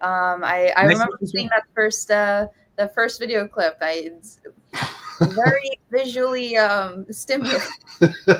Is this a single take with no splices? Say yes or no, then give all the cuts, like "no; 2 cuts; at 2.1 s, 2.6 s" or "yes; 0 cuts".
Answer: yes; 0 cuts